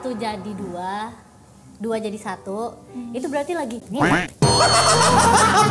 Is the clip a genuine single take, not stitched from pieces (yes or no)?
yes